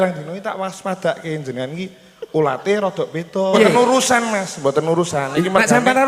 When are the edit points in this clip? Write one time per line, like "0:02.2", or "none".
0:03.6